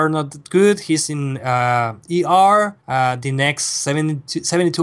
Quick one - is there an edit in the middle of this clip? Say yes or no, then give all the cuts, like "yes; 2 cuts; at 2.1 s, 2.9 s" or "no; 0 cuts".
yes; 1 cut; at 2.8 s